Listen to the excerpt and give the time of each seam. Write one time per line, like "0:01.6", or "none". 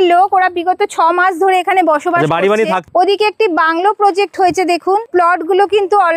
0:02.9
0:05.1